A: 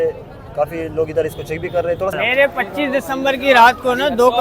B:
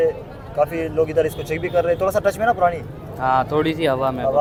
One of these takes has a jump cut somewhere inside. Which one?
A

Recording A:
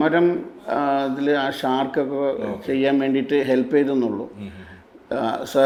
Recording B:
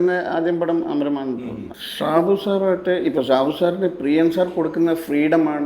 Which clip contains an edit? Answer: B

